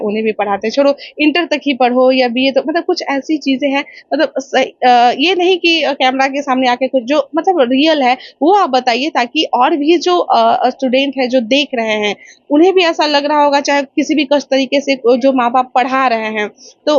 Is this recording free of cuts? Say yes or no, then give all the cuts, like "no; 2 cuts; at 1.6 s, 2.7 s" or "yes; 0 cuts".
yes; 0 cuts